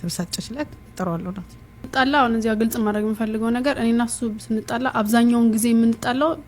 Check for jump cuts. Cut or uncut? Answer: cut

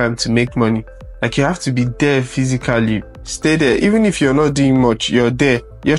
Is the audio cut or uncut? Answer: uncut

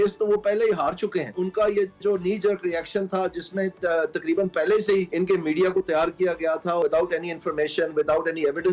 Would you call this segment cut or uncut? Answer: cut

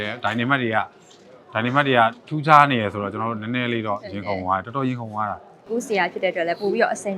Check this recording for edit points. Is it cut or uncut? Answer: cut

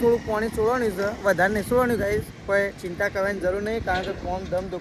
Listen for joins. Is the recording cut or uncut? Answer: uncut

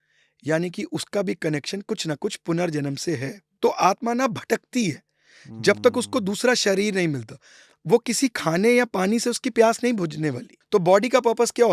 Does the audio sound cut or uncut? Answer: cut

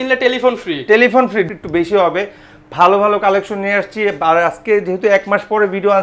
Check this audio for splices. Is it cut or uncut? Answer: cut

